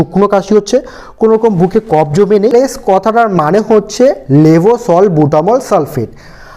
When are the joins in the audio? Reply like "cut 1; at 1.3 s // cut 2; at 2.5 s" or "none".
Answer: cut 1; at 2.5 s